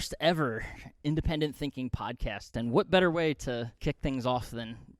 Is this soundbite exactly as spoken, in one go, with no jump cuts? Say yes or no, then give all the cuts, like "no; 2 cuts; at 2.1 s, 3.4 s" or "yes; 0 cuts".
no; 2 cuts; at 2.5 s, 3.7 s